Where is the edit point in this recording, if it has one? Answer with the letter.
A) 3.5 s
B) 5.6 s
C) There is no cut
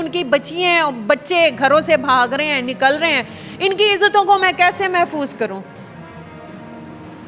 C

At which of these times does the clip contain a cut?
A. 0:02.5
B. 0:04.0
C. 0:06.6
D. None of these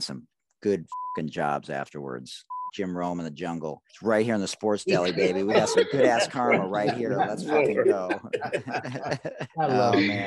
A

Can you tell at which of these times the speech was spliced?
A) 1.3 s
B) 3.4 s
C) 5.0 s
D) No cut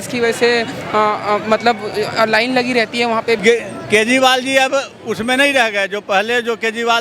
B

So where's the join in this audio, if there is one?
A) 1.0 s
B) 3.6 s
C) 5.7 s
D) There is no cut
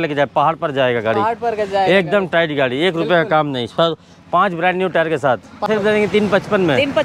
C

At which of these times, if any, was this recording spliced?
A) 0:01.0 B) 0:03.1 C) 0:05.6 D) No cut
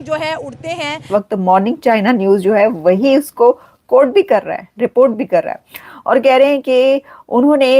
A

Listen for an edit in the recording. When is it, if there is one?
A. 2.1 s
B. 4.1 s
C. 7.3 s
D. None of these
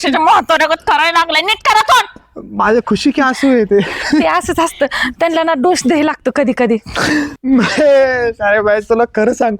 C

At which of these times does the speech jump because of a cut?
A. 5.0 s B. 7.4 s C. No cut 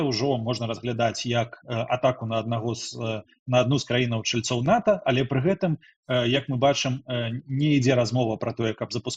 C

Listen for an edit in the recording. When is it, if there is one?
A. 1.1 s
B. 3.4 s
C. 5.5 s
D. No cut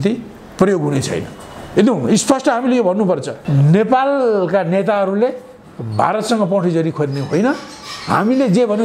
B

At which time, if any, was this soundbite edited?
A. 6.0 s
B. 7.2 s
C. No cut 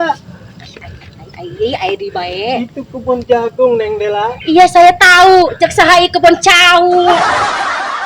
B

